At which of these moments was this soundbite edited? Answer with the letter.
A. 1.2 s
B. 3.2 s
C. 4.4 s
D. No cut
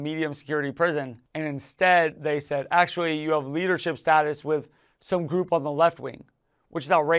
A